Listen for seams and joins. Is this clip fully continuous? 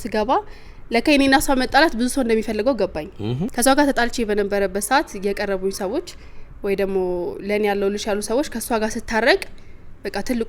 no; 1 cut; at 3.5 s

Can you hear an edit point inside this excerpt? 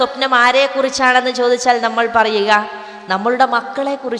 no; 0 cuts

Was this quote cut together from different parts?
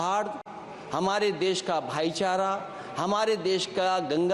no; 0 cuts

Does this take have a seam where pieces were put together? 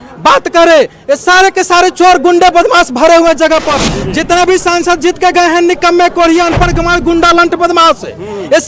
yes; 1 cut; at 3.9 s

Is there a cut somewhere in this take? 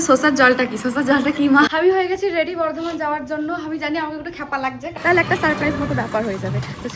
yes; 2 cuts; at 1.7 s, 4.9 s

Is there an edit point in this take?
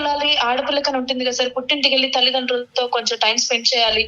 no; 0 cuts

